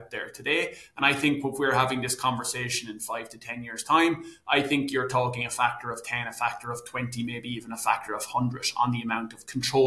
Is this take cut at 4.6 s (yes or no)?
no